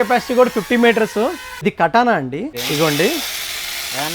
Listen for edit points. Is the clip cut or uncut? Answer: cut